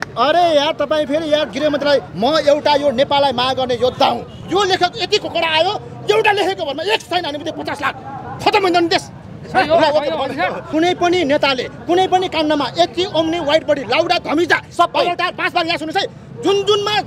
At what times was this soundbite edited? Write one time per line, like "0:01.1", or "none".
0:04.3
0:10.6